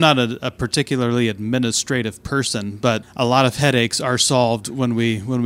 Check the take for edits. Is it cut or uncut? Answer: cut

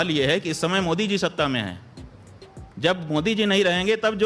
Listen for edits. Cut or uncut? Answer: uncut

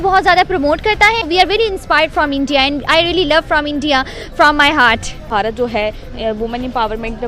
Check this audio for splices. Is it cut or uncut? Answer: cut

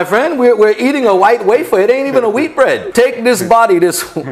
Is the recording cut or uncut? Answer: cut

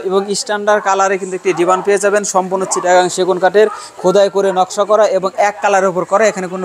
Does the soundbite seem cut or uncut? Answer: uncut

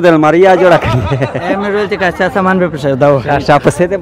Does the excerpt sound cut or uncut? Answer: uncut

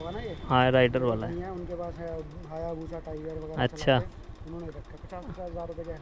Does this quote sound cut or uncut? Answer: uncut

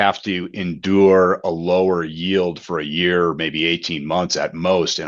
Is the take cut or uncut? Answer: uncut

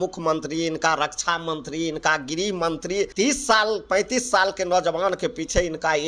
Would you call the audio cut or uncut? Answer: cut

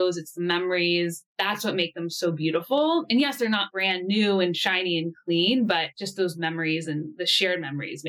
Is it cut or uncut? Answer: cut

